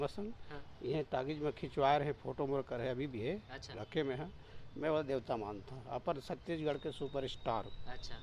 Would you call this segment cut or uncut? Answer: uncut